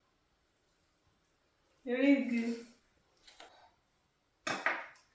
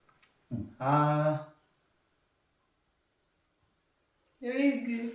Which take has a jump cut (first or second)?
first